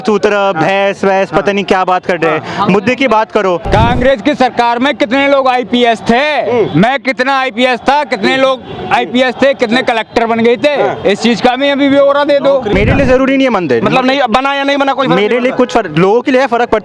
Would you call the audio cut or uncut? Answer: cut